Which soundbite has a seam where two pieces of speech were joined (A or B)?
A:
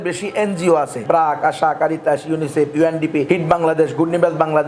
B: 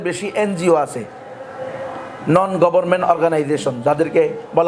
A